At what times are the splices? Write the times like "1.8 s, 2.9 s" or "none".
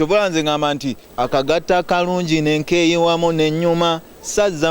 1.0 s